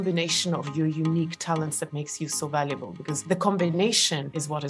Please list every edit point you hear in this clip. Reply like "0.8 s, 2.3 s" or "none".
3.2 s